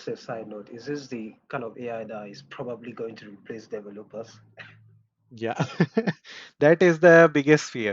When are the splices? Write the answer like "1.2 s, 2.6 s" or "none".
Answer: none